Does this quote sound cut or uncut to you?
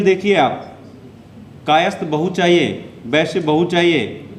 uncut